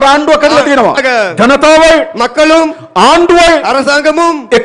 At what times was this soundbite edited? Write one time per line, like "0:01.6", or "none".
0:01.0